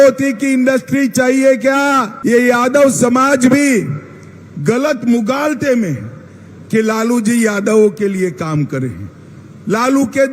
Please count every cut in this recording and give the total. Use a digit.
1